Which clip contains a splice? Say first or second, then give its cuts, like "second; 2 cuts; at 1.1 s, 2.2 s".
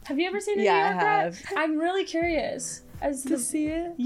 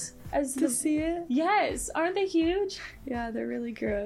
first; 1 cut; at 1.4 s